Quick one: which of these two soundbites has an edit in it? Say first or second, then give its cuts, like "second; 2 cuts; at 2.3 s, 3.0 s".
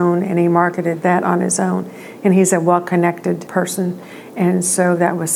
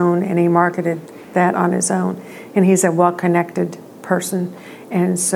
first; 2 cuts; at 1.0 s, 3.4 s